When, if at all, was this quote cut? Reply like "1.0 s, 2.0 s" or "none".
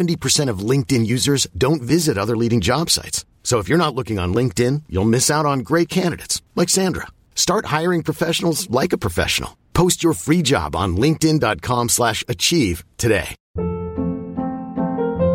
13.4 s